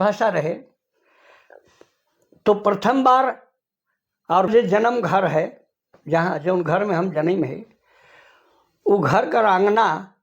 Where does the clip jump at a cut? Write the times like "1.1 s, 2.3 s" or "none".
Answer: 4.5 s